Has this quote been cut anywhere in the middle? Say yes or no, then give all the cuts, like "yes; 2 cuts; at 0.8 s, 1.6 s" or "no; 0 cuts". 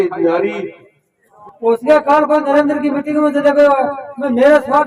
yes; 1 cut; at 1.3 s